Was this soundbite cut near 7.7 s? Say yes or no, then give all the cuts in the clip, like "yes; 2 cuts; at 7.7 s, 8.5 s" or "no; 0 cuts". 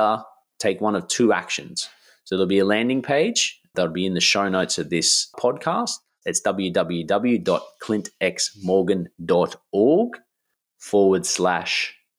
no; 3 cuts; at 3.7 s, 5.4 s, 6.1 s